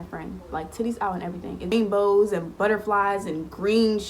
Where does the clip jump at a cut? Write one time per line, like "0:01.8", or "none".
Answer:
0:01.7